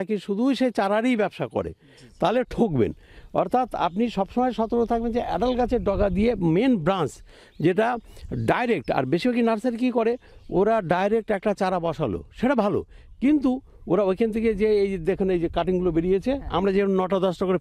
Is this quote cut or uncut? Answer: uncut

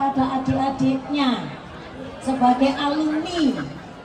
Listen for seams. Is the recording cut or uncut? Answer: uncut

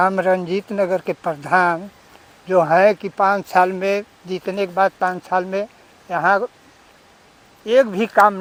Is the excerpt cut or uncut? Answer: uncut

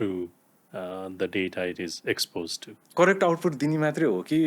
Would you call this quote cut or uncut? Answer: cut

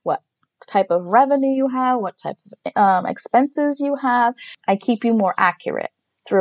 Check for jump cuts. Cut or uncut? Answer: cut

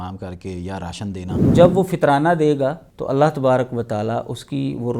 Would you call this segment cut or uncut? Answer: cut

